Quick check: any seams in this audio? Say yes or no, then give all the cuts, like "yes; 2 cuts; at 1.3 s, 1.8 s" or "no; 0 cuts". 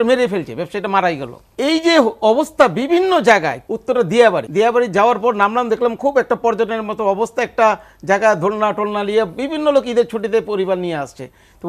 yes; 3 cuts; at 1.4 s, 3.6 s, 4.4 s